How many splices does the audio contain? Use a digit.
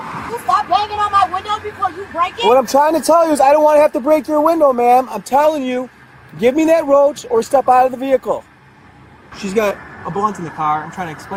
0